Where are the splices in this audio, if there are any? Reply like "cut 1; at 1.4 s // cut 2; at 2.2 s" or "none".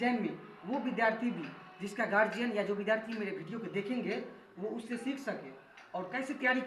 none